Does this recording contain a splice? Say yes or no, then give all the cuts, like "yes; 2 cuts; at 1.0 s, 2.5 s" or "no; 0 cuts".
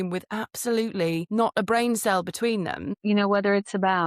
yes; 1 cut; at 2.9 s